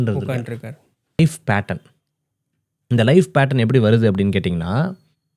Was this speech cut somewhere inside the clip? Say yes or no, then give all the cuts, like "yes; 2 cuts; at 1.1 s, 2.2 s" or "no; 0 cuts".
yes; 1 cut; at 1.2 s